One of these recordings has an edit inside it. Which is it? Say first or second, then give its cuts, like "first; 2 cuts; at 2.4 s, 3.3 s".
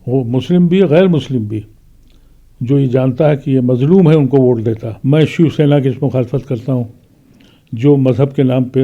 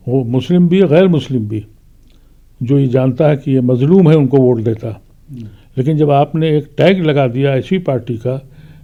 first; 1 cut; at 4.9 s